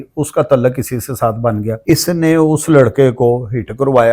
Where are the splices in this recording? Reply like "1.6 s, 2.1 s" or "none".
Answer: 1.8 s